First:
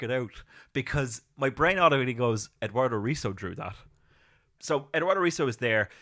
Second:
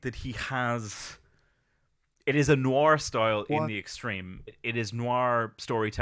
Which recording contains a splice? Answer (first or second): first